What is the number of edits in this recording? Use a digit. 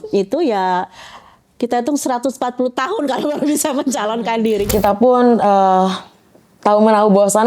1